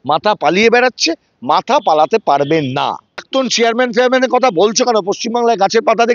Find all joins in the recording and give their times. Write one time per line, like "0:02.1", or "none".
0:03.2